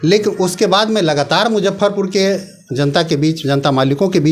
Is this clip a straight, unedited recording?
yes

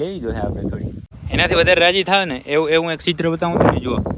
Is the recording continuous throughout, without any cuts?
no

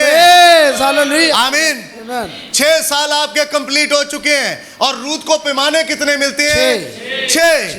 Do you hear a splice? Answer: no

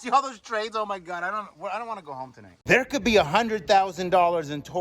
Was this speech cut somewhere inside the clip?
yes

